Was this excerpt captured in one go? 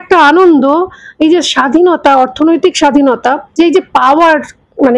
yes; 0 cuts

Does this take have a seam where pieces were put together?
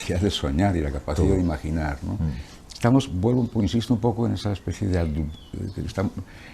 no; 0 cuts

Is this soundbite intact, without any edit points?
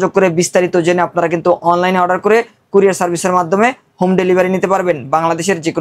yes; 0 cuts

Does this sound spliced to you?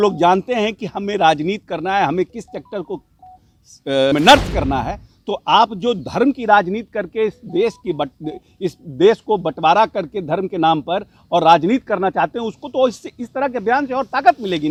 no; 0 cuts

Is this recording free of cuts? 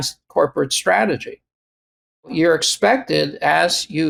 yes; 0 cuts

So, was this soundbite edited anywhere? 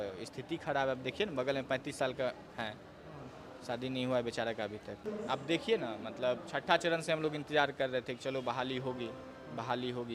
no; 0 cuts

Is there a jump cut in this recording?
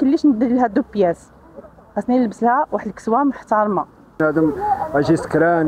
yes; 1 cut; at 4.2 s

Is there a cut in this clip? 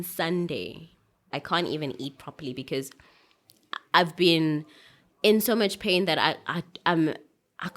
yes; 1 cut; at 1.3 s

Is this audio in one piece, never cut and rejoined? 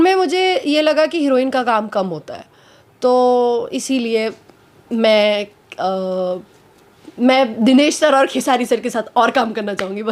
yes; 0 cuts

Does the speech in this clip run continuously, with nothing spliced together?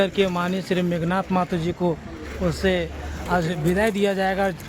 no; 1 cut; at 3.1 s

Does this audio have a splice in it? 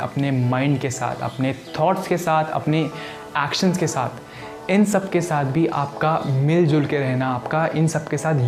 no; 0 cuts

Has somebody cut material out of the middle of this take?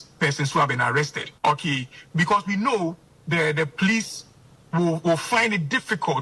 no; 0 cuts

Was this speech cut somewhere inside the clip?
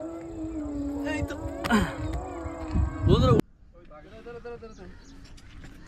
yes; 1 cut; at 3.4 s

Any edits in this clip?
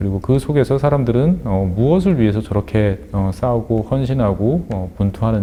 no; 0 cuts

